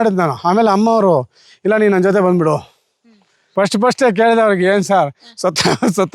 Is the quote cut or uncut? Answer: cut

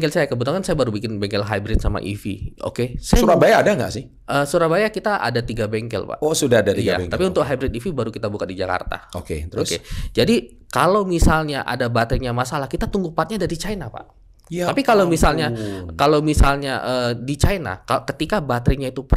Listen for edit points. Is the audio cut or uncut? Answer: uncut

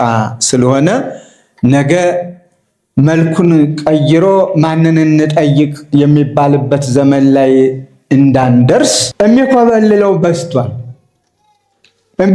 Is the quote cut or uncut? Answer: cut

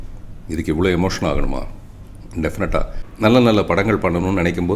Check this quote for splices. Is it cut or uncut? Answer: cut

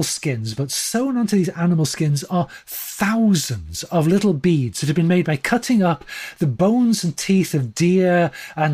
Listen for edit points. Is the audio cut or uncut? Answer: uncut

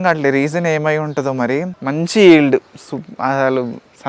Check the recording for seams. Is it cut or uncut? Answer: cut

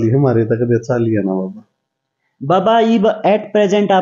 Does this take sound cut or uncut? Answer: uncut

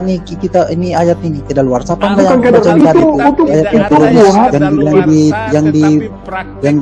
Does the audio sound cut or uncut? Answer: uncut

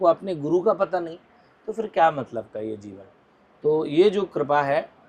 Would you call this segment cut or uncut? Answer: uncut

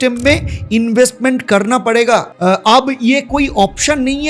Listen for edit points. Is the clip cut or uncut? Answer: uncut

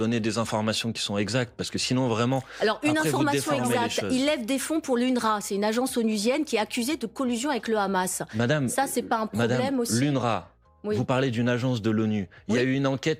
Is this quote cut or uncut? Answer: uncut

